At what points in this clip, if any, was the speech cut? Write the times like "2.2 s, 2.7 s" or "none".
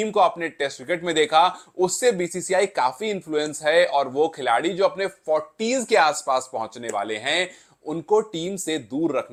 none